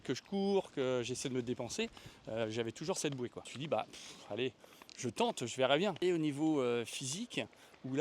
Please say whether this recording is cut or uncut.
cut